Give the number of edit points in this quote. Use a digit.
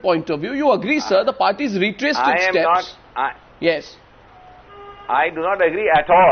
1